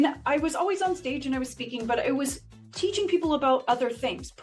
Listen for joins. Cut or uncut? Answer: uncut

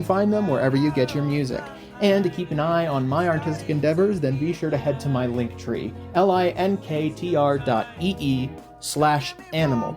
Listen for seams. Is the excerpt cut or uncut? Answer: cut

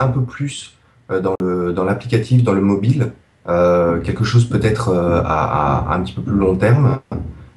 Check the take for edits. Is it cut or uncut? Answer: uncut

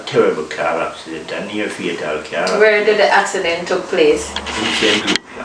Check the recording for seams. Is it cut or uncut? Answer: uncut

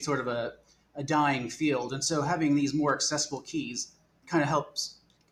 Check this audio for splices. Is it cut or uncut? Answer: uncut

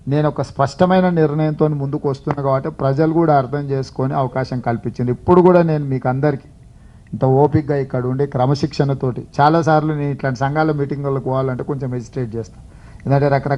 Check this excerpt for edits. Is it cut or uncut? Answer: cut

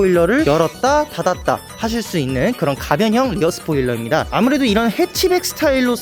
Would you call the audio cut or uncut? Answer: cut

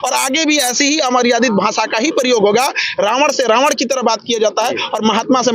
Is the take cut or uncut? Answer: uncut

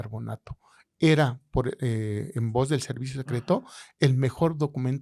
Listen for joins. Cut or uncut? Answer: uncut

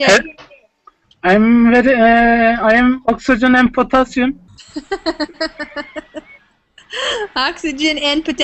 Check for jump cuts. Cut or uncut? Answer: cut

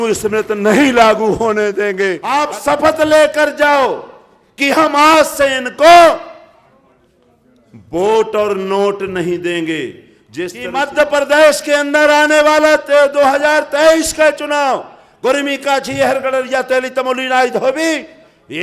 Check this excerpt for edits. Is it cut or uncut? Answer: cut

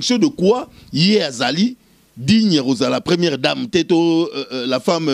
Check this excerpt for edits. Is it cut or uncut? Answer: uncut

